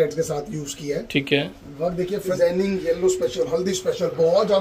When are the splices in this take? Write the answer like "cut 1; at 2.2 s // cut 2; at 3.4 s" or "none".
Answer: cut 1; at 2.4 s